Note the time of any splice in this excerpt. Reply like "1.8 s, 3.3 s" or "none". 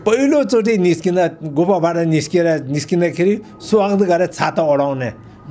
none